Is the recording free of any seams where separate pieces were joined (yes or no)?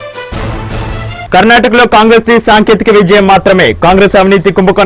yes